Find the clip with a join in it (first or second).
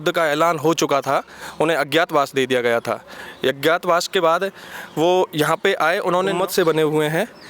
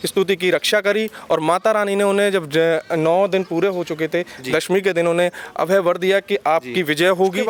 first